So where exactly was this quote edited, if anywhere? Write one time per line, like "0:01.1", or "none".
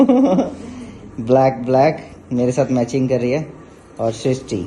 none

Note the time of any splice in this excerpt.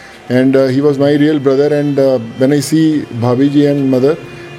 none

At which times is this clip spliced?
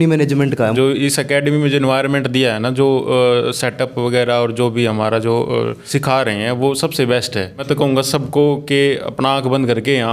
0:00.7
0:05.8
0:07.6

